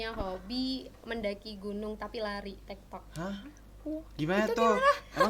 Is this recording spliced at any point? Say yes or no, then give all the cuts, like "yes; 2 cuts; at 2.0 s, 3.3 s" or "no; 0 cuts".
no; 0 cuts